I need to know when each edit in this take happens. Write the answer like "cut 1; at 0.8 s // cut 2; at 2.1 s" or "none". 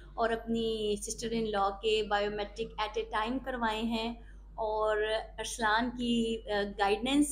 none